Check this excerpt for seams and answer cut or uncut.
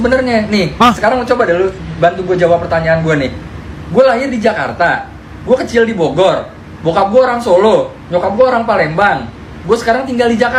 uncut